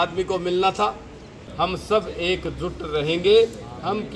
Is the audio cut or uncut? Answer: cut